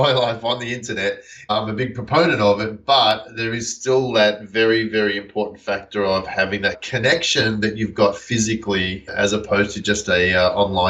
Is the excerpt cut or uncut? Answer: cut